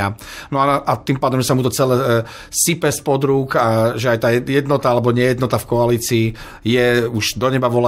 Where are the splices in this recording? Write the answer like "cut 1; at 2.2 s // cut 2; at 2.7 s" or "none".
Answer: none